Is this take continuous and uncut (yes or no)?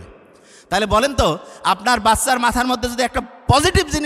yes